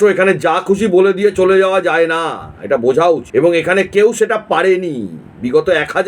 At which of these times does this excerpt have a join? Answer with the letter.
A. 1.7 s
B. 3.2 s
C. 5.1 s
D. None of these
B